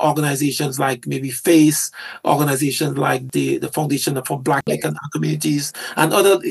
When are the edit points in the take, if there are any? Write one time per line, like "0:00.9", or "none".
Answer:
0:03.3
0:04.6

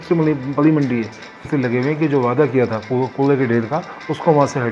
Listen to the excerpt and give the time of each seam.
0:01.4

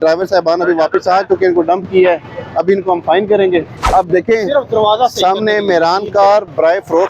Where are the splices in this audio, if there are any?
0:03.9

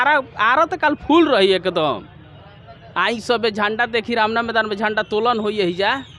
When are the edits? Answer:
none

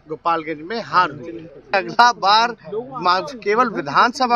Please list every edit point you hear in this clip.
0:01.7

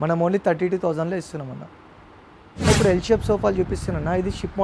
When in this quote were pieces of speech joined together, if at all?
none

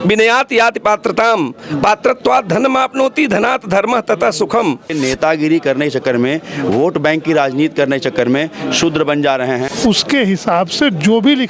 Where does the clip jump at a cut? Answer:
0:04.9
0:09.7

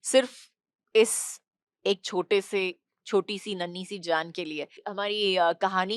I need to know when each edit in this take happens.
0:04.8

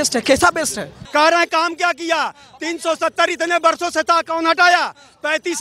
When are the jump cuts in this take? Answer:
0:01.0

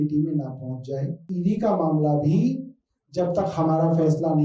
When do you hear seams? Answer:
0:01.2

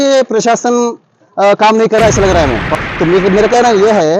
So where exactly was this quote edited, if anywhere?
0:02.7

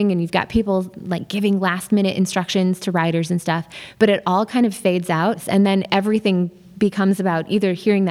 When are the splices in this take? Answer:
0:05.4

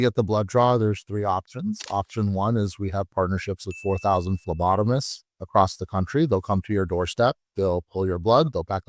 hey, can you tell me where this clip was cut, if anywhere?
none

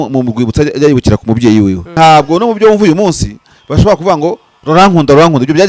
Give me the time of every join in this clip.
0:01.8

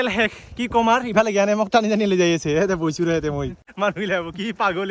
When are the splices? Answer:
0:03.6

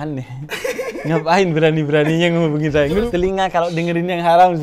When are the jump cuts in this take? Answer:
0:03.0

